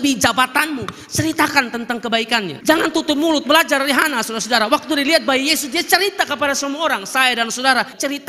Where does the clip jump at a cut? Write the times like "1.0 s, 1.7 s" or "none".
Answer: 2.5 s